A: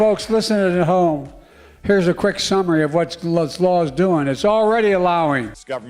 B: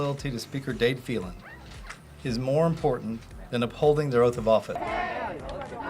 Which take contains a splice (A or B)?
B